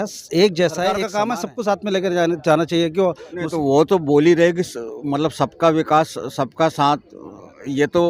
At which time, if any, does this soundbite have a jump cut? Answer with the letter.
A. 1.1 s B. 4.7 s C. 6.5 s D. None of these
A